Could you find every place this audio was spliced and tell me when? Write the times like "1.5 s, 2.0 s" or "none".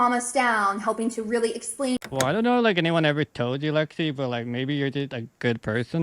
2.1 s